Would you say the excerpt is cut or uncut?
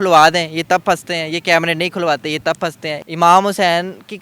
cut